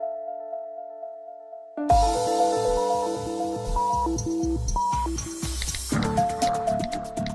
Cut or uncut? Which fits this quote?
cut